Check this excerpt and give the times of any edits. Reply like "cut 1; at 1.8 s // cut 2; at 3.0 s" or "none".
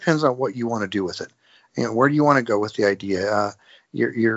none